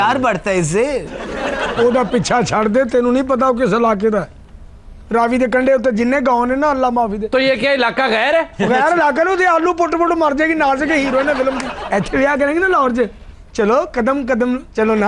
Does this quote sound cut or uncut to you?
uncut